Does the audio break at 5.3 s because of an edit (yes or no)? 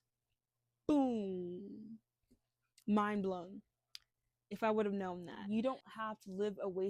yes